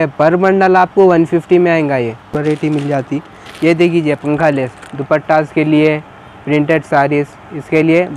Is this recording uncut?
no; 1 cut; at 2.3 s

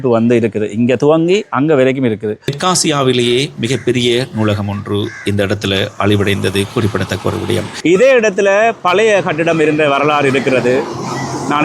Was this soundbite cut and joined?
yes; 2 cuts; at 2.5 s, 7.7 s

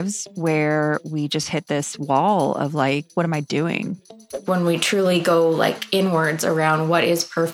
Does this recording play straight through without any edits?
no; 2 cuts; at 3.1 s, 4.2 s

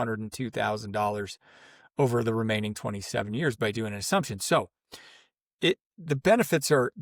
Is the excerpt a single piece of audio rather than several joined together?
yes; 0 cuts

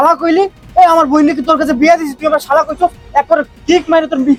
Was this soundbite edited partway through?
no; 0 cuts

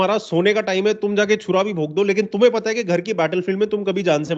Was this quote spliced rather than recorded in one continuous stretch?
no; 0 cuts

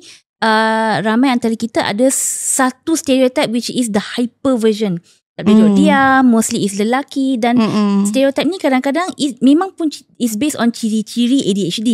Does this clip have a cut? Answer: no; 0 cuts

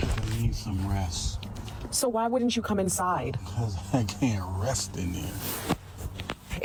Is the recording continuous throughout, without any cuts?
yes; 0 cuts

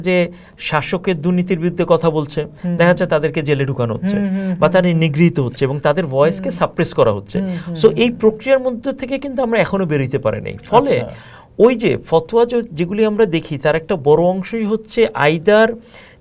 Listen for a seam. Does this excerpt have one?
no; 0 cuts

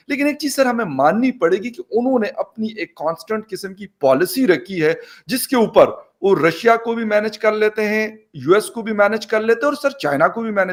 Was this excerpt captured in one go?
yes; 0 cuts

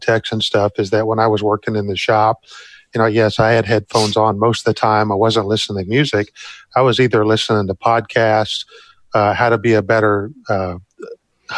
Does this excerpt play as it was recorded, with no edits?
yes; 0 cuts

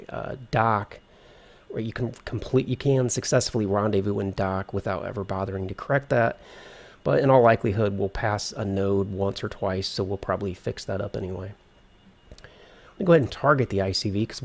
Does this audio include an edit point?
yes; 1 cut; at 12.7 s

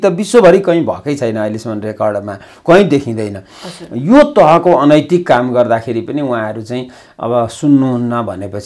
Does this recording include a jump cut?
no; 0 cuts

